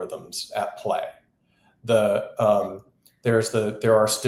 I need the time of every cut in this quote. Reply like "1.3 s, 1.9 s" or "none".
none